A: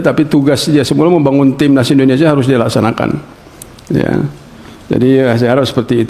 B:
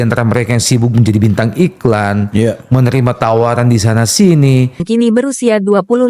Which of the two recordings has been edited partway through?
B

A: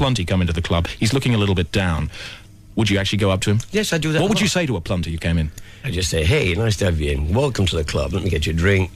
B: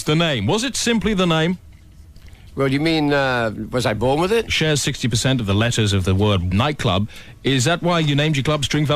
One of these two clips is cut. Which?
B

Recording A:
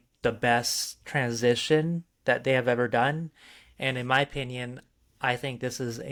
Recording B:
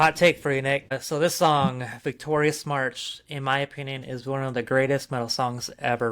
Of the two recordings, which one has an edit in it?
B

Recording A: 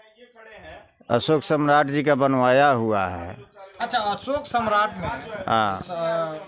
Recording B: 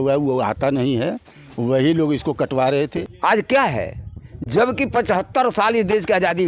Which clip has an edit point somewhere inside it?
B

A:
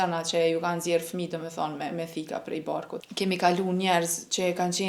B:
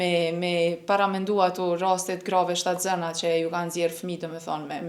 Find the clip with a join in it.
A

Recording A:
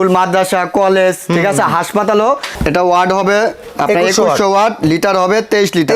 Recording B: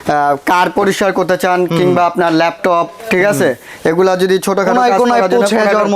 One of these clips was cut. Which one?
A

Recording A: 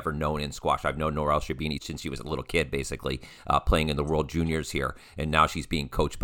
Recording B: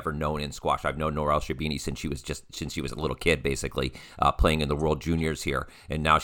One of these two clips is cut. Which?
A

